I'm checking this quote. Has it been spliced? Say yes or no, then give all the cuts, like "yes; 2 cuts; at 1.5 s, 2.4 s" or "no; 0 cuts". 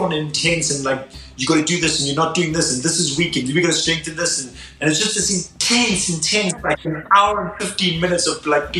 yes; 1 cut; at 4.6 s